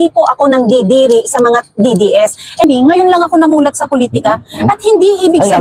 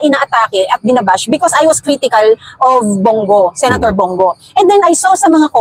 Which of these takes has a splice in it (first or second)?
first